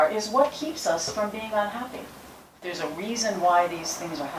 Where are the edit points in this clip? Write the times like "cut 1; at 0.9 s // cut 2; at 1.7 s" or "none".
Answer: cut 1; at 2.7 s